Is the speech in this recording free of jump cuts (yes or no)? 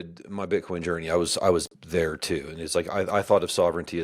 yes